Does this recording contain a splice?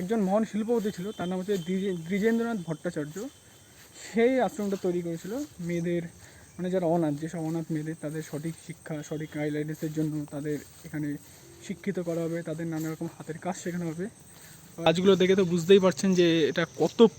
yes; 1 cut; at 14.9 s

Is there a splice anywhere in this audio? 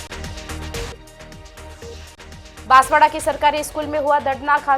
yes; 1 cut; at 0.9 s

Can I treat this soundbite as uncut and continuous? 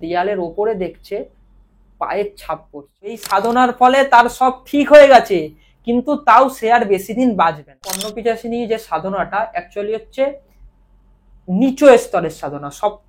no; 2 cuts; at 3.2 s, 8.1 s

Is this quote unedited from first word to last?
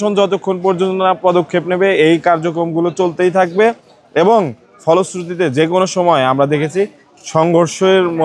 yes; 0 cuts

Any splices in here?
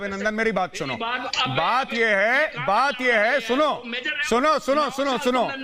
no; 0 cuts

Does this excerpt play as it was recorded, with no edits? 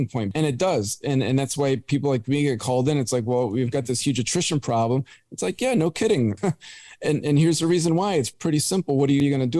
yes; 0 cuts

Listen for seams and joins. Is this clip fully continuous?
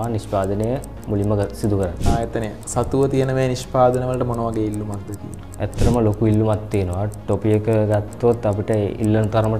no; 1 cut; at 2.0 s

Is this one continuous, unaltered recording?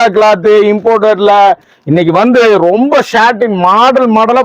yes; 0 cuts

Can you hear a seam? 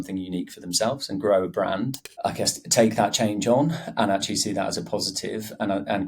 yes; 1 cut; at 2.1 s

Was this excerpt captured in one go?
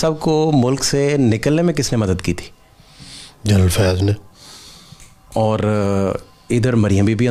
yes; 0 cuts

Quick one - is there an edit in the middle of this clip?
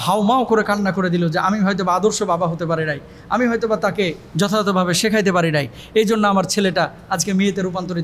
no; 0 cuts

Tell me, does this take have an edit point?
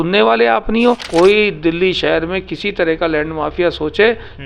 yes; 1 cut; at 1.0 s

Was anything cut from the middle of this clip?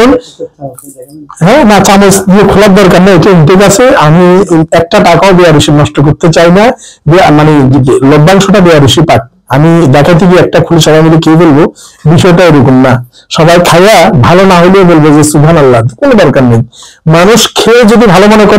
no; 0 cuts

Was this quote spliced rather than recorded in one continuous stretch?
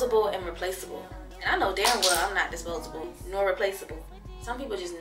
no; 0 cuts

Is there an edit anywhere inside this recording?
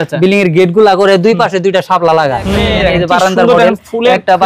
yes; 1 cut; at 2.5 s

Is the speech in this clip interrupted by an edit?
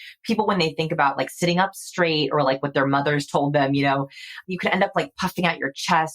yes; 1 cut; at 4.4 s

